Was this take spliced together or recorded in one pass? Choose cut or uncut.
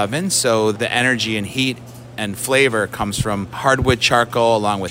cut